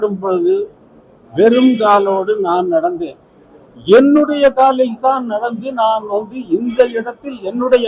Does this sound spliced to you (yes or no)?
no